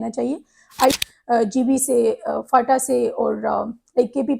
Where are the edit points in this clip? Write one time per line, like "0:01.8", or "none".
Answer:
0:01.0